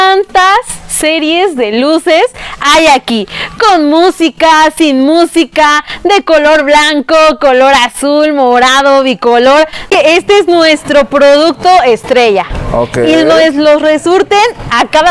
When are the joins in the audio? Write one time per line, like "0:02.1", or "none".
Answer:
0:09.9